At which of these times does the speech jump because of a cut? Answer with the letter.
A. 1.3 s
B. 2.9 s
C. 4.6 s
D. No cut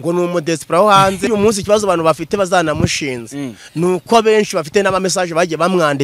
A